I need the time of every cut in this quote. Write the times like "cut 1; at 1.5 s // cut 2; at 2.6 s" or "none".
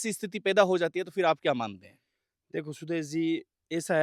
none